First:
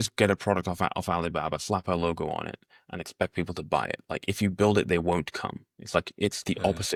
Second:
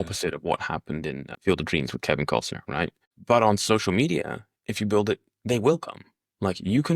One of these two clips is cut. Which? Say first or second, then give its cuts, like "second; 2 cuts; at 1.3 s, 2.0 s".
second; 2 cuts; at 1.3 s, 3.1 s